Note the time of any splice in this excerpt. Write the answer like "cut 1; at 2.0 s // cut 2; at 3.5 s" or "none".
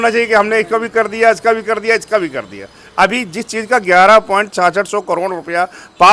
none